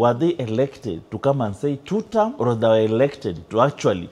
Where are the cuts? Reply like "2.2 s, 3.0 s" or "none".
2.3 s